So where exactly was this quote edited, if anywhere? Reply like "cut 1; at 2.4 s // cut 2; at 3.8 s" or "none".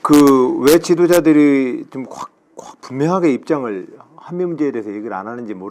cut 1; at 1.6 s